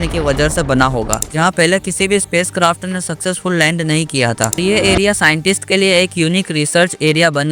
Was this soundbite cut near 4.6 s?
yes; 2 cuts; at 1.2 s, 4.6 s

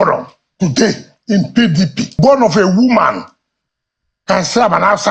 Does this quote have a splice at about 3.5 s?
no; 1 cut; at 2.1 s

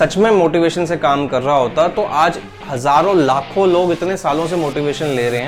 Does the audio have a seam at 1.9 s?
no; 0 cuts

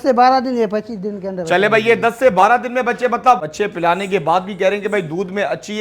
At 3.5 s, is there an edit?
yes; 1 cut; at 3.5 s

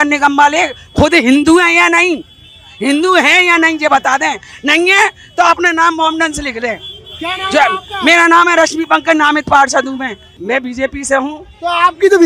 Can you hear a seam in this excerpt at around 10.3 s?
yes; 1 cut; at 10.3 s

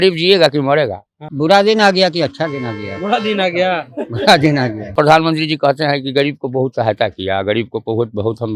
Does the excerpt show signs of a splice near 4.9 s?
yes; 2 cuts; at 1.3 s, 4.9 s

